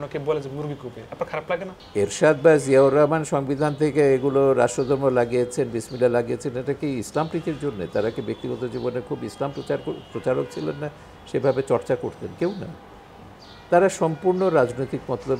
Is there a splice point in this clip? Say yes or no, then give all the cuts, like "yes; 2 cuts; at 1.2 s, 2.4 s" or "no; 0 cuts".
yes; 1 cut; at 1.8 s